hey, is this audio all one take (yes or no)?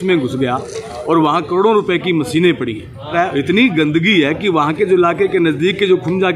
no